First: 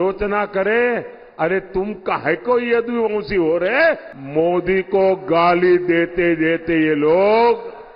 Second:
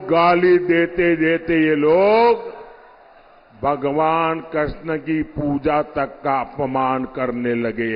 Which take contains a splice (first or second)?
first